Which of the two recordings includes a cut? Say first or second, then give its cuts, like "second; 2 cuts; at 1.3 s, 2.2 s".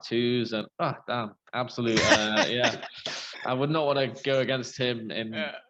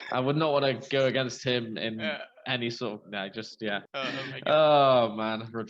second; 1 cut; at 3.9 s